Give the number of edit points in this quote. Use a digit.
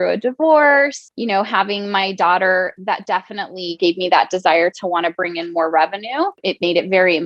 3